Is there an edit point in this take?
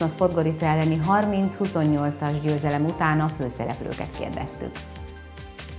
yes; 1 cut; at 4.8 s

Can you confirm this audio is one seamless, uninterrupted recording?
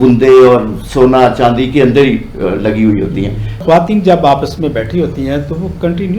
no; 1 cut; at 3.6 s

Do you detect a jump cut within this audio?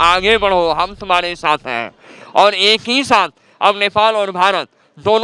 no; 0 cuts

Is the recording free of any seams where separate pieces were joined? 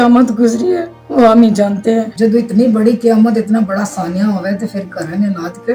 no; 2 cuts; at 0.9 s, 2.1 s

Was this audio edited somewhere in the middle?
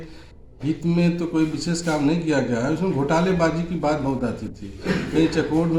no; 0 cuts

